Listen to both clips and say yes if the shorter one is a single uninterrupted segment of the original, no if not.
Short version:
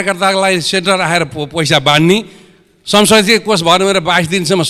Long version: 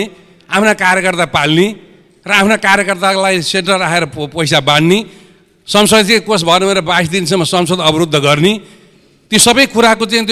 yes